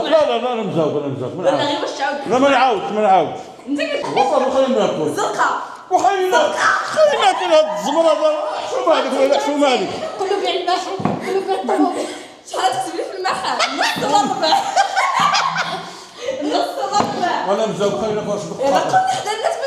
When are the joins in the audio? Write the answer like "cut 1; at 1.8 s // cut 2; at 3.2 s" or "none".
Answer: cut 1; at 4.1 s